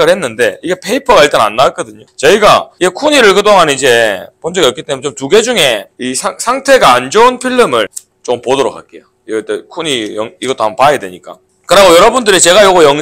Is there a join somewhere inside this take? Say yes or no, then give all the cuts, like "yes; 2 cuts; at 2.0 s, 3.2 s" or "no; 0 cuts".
no; 0 cuts